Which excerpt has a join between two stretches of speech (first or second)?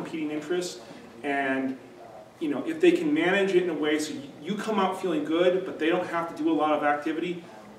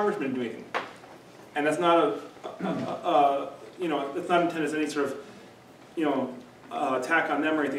second